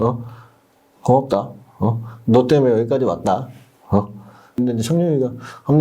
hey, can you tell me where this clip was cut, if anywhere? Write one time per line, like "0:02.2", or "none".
0:04.6

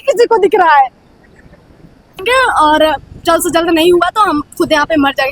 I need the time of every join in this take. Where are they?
0:02.2

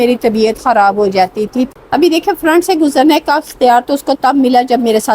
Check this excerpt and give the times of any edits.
0:01.7

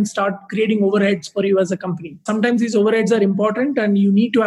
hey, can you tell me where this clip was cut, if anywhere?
0:02.2

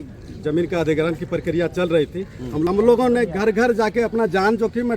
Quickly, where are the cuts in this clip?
0:02.7

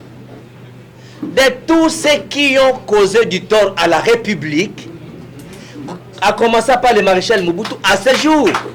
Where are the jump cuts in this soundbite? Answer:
none

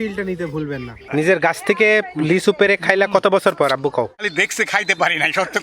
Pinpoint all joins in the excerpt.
0:00.9
0:04.2

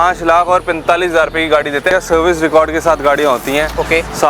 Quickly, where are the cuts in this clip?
0:01.9

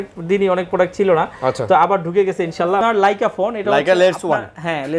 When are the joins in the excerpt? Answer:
0:02.8

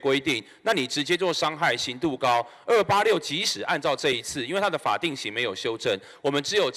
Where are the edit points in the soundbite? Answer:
none

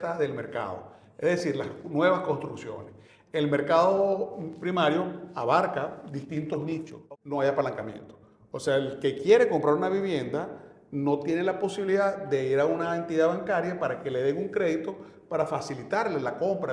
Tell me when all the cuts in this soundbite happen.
0:06.9

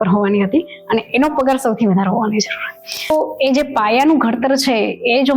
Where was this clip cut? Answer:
0:03.1

